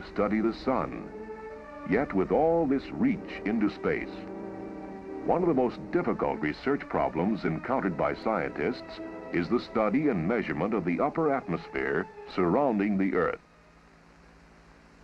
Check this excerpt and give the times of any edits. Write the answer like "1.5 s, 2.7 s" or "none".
1.0 s